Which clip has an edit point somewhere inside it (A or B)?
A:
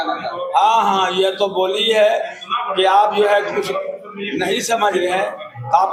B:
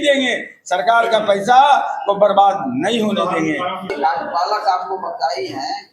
B